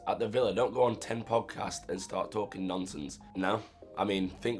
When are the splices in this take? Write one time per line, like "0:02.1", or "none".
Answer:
0:03.2